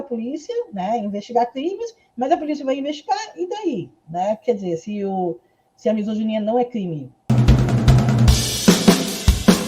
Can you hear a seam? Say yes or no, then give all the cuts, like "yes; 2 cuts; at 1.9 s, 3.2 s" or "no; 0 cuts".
yes; 1 cut; at 7.2 s